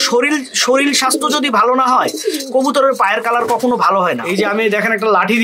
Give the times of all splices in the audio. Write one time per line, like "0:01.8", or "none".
0:04.3